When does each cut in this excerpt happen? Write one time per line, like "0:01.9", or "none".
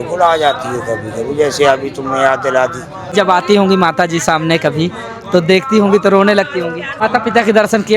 0:03.1
0:06.9